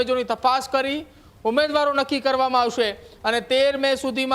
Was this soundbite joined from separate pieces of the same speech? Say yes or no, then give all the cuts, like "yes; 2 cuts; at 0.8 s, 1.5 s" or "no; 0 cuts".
no; 0 cuts